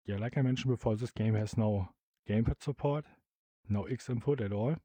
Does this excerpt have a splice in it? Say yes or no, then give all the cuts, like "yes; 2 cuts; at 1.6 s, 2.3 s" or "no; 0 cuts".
no; 0 cuts